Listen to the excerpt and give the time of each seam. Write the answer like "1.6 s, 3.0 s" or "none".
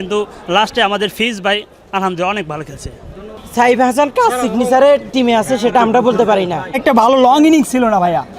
3.2 s, 6.6 s